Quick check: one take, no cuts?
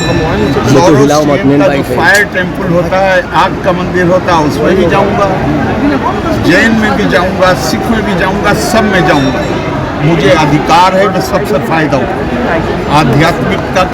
yes; 0 cuts

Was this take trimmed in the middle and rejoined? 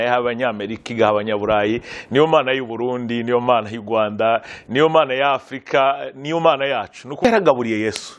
yes; 1 cut; at 7.2 s

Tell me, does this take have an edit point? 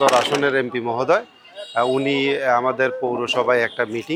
no; 0 cuts

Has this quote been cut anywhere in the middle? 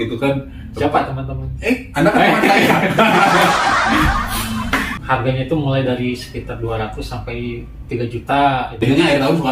yes; 2 cuts; at 4.9 s, 8.8 s

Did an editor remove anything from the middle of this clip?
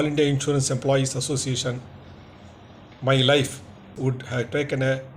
yes; 1 cut; at 3.9 s

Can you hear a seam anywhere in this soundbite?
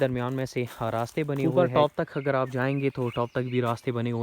yes; 1 cut; at 1.4 s

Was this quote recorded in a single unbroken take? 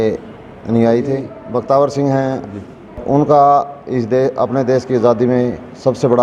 no; 2 cuts; at 1.3 s, 3.0 s

